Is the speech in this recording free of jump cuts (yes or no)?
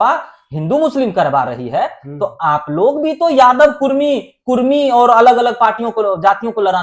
yes